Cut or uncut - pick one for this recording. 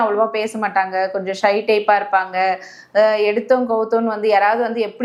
uncut